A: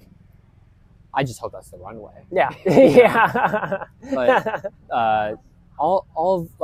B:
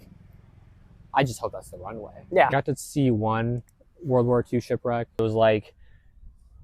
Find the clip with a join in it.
B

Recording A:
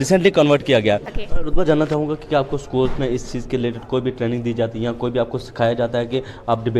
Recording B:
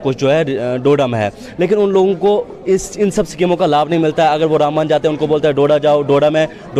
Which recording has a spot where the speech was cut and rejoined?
A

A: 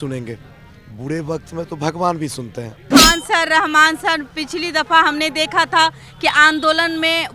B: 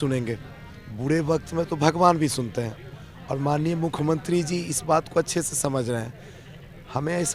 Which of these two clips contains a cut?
A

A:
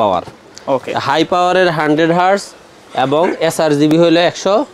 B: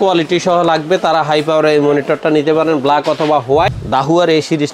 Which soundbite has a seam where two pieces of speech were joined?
B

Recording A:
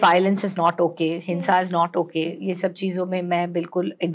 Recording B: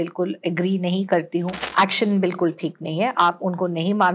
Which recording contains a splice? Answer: B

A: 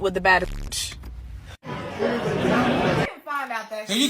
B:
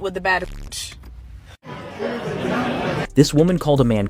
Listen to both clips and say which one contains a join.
A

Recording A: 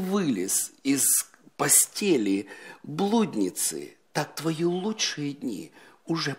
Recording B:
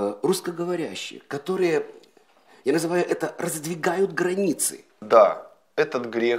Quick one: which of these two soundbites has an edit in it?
B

